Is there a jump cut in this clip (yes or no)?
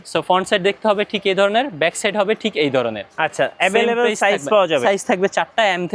no